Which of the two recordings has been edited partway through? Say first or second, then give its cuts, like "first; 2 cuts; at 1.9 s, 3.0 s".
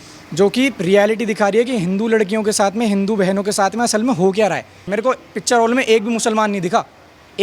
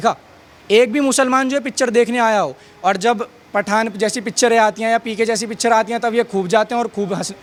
first; 1 cut; at 4.9 s